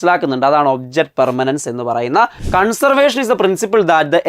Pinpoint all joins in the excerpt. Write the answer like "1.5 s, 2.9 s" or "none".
2.4 s

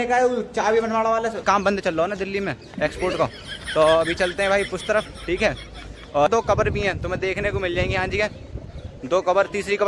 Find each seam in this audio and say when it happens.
1.4 s, 6.3 s

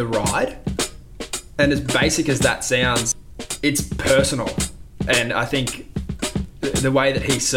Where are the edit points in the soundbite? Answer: 3.1 s

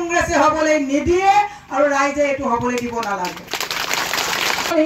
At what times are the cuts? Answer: none

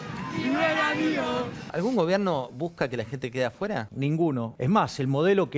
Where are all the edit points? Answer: 1.6 s, 4.3 s

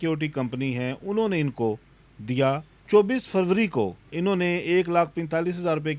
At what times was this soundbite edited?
2.7 s, 4.0 s

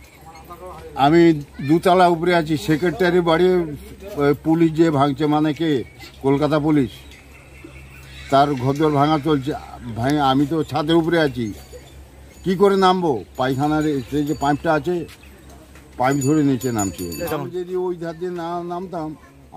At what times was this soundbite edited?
6.1 s, 17.1 s

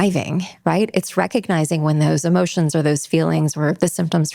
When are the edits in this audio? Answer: none

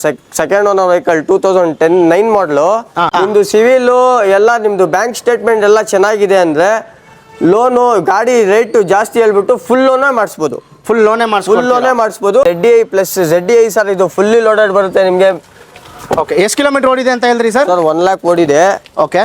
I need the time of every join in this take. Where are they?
3.0 s, 12.4 s

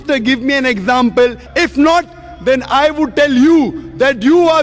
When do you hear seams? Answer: 1.4 s

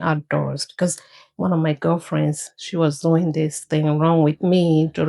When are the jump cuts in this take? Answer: none

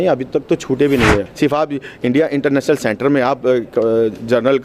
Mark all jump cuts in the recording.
1.3 s

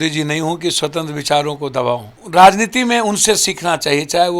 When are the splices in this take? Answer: 2.1 s

